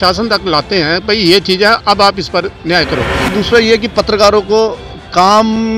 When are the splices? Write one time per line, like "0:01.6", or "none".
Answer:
0:03.2